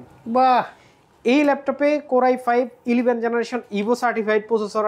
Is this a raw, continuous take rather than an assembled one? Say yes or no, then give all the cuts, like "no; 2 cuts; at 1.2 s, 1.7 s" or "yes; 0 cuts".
yes; 0 cuts